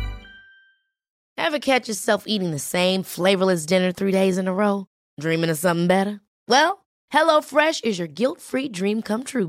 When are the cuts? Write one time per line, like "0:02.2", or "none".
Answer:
0:01.3